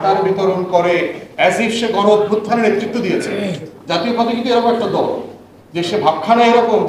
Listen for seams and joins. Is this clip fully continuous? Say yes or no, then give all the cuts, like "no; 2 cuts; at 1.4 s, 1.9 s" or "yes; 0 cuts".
yes; 0 cuts